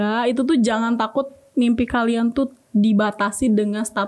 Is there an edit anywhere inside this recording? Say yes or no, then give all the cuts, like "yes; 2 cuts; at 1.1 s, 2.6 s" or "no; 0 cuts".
no; 0 cuts